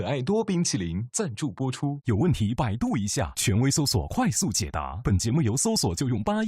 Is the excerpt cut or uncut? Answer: uncut